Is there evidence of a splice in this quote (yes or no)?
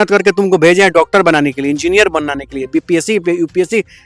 no